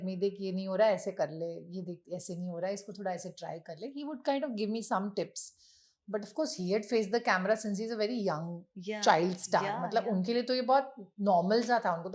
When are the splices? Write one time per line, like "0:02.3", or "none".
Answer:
none